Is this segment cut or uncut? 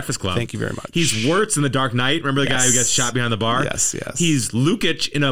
uncut